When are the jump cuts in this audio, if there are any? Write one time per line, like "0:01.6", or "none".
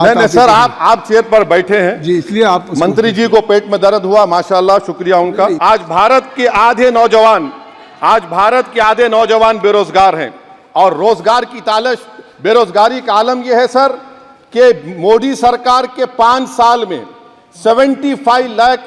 0:05.6